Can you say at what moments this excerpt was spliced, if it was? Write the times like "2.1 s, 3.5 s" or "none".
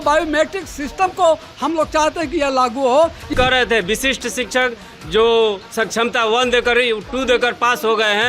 3.3 s